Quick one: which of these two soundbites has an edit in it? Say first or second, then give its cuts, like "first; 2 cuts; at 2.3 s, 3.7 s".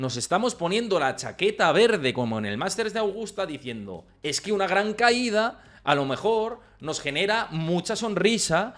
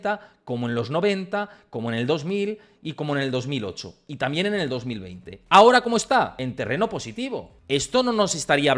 second; 2 cuts; at 6.3 s, 7.5 s